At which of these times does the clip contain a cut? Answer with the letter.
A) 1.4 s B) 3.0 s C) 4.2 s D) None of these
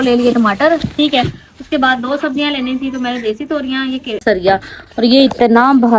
C